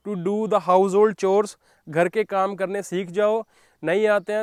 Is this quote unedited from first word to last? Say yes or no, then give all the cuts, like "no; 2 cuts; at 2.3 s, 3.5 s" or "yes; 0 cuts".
yes; 0 cuts